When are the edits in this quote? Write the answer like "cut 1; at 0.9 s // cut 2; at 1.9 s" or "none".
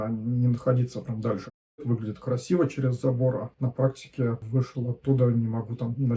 cut 1; at 1.8 s // cut 2; at 3.5 s // cut 3; at 4.4 s